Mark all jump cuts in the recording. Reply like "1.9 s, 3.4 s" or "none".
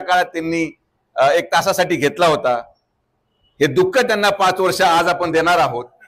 none